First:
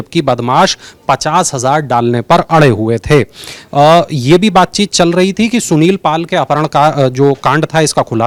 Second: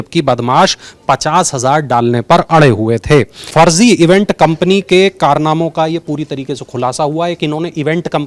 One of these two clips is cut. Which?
second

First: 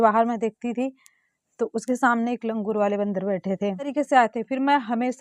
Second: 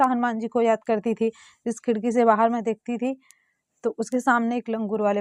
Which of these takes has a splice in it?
first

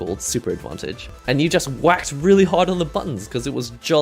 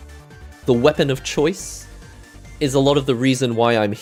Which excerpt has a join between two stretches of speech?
first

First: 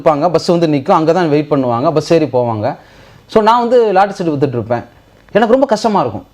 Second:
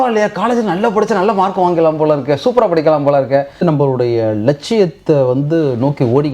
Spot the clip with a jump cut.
second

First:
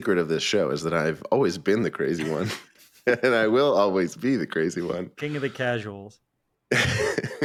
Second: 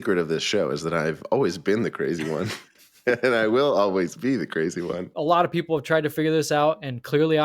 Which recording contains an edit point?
second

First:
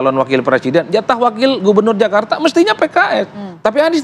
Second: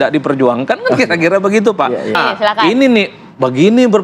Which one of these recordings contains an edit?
second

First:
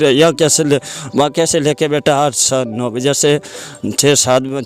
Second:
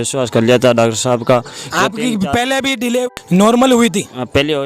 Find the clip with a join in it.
second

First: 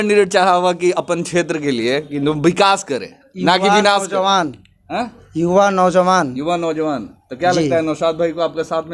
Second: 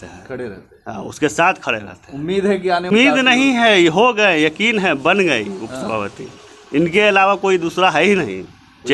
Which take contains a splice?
second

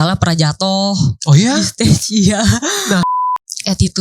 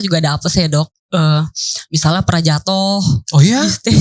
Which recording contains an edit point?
first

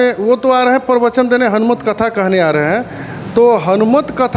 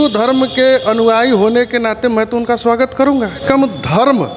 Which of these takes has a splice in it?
second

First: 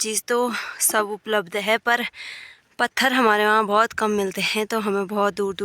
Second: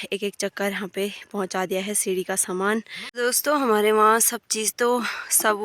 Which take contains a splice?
second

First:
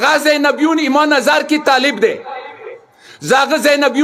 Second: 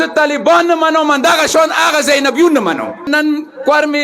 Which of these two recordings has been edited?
second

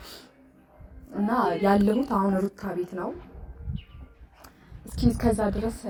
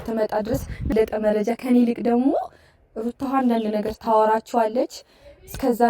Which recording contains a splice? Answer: second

